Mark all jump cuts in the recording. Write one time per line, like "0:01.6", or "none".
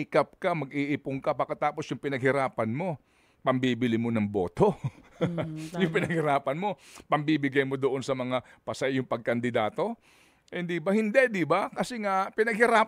none